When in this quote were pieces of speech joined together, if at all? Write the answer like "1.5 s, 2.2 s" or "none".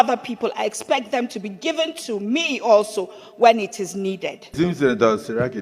4.4 s

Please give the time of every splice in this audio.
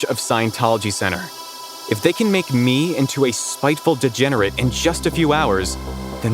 none

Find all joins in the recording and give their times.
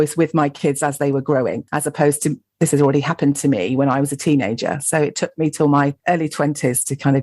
none

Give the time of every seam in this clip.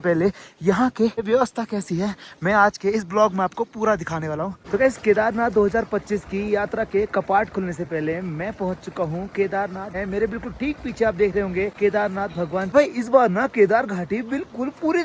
1.2 s, 4.5 s, 9.9 s, 12.1 s

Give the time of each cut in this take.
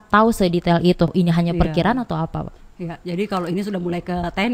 1.1 s

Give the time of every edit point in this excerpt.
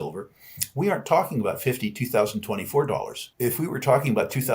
3.2 s

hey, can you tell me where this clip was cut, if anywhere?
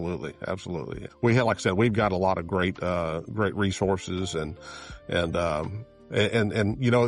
1.0 s

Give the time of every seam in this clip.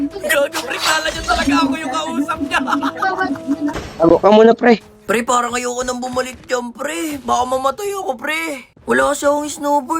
3.7 s, 4.9 s

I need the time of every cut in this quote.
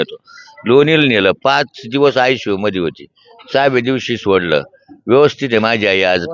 none

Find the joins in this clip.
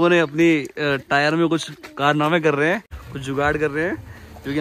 none

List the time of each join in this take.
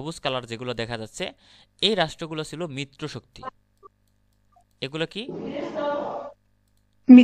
none

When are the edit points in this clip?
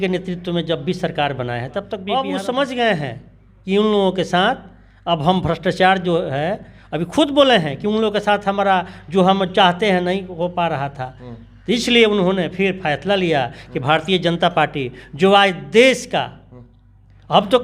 2.0 s

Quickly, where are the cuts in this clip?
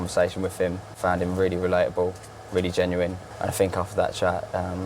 1.0 s, 3.2 s

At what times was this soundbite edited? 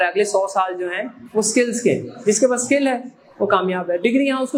none

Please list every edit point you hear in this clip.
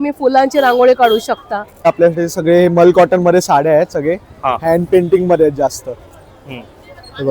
1.9 s

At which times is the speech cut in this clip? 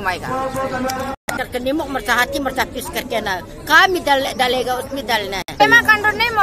1.2 s, 5.6 s

